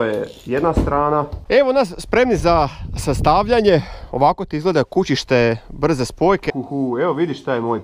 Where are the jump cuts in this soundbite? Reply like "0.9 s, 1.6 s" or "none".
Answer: 1.4 s, 6.5 s